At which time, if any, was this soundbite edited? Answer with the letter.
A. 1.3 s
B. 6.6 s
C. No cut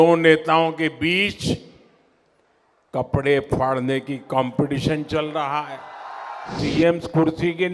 B